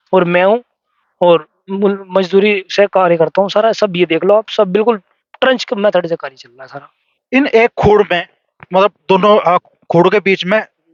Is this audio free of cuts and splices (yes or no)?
yes